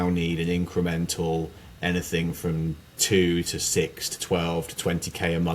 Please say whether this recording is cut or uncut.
uncut